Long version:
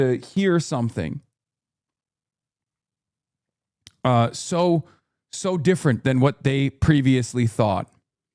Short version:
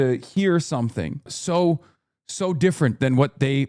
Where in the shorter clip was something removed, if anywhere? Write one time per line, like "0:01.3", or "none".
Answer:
0:01.4